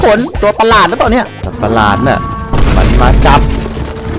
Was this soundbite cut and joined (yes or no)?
yes